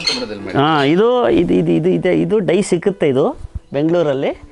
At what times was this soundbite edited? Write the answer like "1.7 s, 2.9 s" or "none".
none

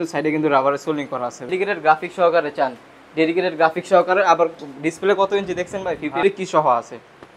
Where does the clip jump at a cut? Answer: 1.5 s, 6.2 s

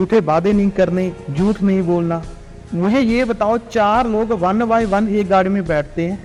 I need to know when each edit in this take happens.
none

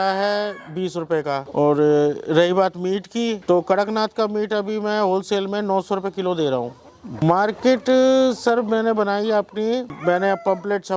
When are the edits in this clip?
7.1 s

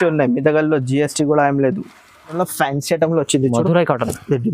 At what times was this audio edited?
2.3 s

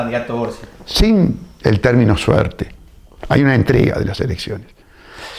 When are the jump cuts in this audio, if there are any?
none

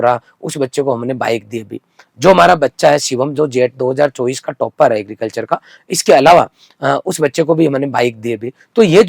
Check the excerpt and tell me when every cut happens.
none

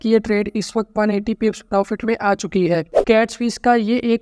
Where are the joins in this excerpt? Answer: 2.9 s

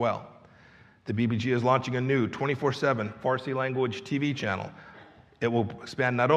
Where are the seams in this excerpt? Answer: none

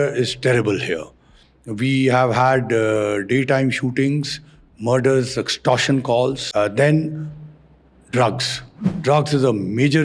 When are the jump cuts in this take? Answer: 6.4 s

